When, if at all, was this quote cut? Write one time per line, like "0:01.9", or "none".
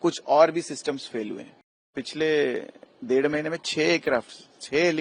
0:02.0